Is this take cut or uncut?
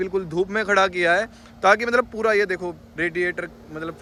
uncut